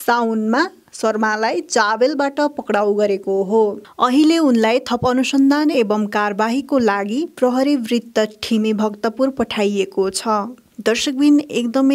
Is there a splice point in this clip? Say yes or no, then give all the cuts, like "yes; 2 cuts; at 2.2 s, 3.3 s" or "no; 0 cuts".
no; 0 cuts